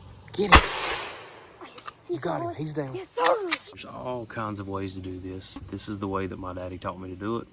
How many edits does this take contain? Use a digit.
2